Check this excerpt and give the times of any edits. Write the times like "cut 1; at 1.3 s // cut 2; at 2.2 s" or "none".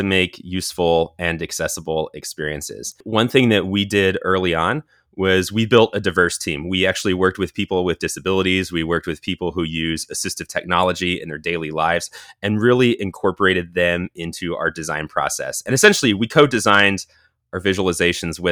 cut 1; at 3.0 s